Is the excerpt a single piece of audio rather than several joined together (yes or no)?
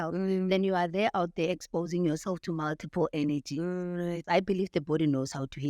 no